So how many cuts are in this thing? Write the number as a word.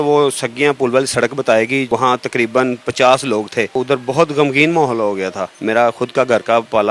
two